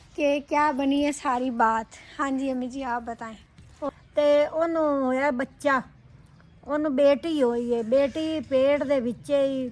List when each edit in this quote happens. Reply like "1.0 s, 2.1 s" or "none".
3.9 s